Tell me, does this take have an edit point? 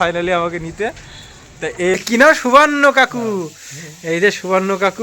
yes; 1 cut; at 1.9 s

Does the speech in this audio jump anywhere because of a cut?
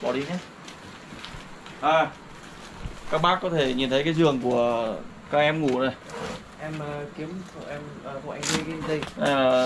no; 0 cuts

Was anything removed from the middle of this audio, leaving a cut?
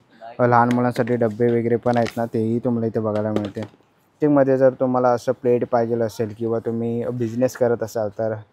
yes; 1 cut; at 4.1 s

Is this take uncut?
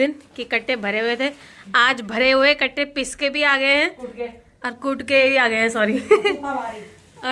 yes; 0 cuts

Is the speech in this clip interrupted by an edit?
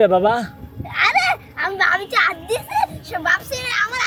no; 0 cuts

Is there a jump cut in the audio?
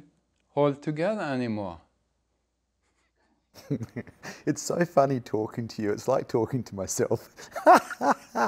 no; 0 cuts

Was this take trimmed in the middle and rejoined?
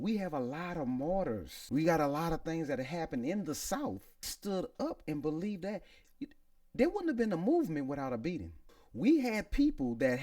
yes; 3 cuts; at 1.5 s, 4.3 s, 8.8 s

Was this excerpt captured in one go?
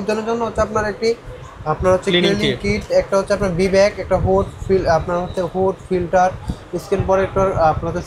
yes; 0 cuts

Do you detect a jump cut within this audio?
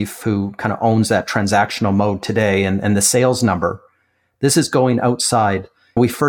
no; 0 cuts

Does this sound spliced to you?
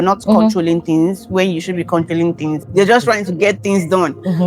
yes; 1 cut; at 2.6 s

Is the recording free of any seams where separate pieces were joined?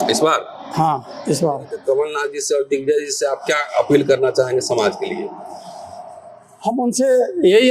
no; 1 cut; at 1.8 s

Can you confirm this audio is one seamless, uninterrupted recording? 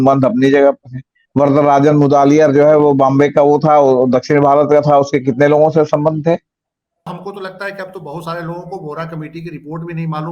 no; 1 cut; at 7.1 s

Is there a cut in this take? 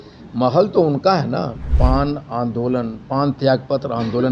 yes; 1 cut; at 1.6 s

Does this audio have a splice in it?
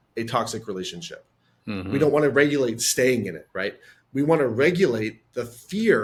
no; 0 cuts

